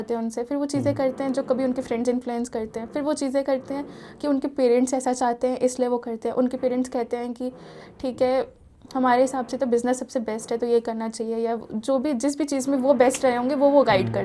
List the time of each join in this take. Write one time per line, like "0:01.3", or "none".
none